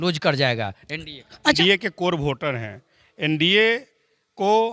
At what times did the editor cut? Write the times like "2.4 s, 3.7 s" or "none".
1.6 s